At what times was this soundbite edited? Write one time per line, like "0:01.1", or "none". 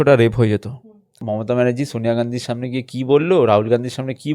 0:01.2

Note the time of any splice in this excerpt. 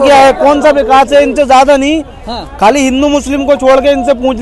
none

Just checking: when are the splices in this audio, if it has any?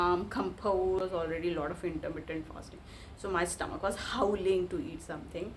0:01.0

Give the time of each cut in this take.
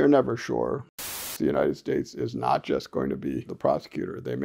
0:01.2
0:03.5

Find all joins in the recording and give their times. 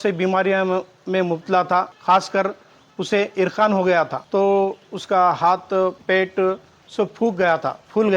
0:01.9
0:04.2
0:06.0

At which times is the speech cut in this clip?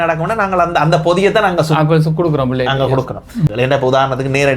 0:03.5

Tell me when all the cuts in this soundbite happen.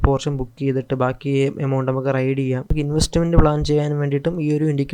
0:02.7

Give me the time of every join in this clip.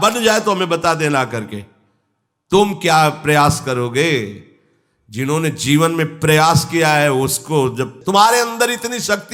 0:08.0

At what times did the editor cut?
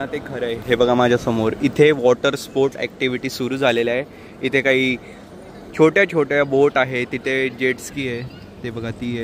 none

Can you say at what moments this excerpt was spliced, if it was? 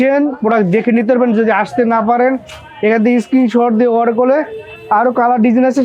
none

